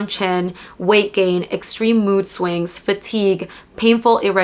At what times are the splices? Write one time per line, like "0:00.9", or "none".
none